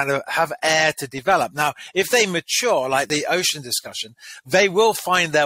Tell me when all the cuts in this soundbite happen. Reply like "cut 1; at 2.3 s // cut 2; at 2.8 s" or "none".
cut 1; at 3.1 s